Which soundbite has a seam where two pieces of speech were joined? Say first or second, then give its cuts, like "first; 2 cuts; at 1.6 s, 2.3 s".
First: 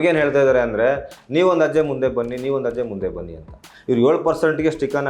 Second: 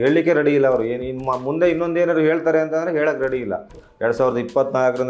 second; 1 cut; at 3.8 s